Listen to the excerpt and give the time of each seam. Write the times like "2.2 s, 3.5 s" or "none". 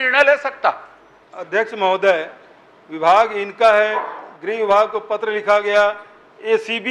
1.4 s